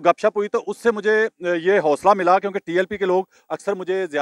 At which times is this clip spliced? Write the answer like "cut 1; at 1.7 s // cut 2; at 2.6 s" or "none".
none